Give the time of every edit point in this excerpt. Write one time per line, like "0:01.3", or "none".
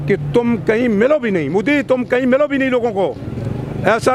none